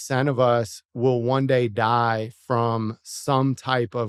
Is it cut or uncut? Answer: uncut